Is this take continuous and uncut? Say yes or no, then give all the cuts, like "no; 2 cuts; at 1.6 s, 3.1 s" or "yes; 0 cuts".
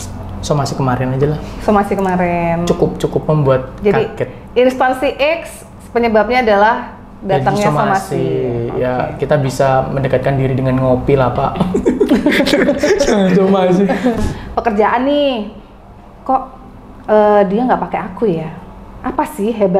no; 1 cut; at 14.2 s